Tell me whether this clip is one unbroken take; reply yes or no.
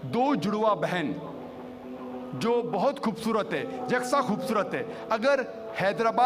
yes